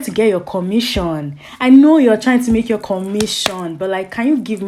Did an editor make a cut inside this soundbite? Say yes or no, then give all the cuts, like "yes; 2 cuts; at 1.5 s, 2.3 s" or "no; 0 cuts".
no; 0 cuts